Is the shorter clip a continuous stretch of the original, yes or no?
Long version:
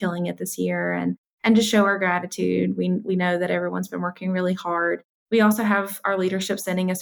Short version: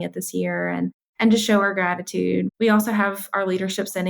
no